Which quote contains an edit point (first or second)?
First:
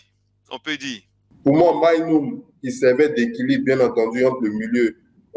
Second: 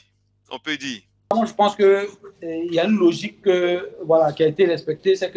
first